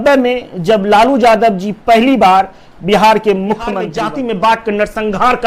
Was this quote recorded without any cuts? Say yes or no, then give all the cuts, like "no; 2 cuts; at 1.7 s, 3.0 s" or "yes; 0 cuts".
no; 1 cut; at 3.9 s